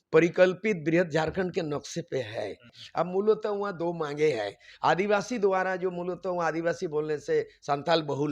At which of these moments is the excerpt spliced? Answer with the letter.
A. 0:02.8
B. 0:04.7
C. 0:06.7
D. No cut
A